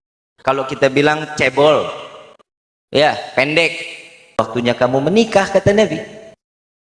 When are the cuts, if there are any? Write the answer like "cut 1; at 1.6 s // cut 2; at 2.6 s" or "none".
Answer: cut 1; at 4.4 s